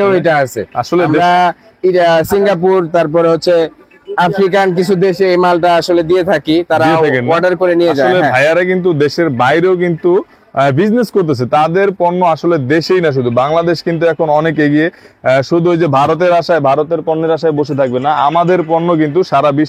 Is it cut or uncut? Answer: uncut